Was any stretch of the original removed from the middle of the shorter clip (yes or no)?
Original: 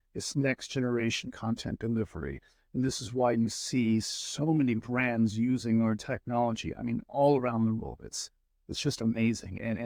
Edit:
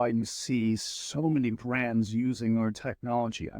no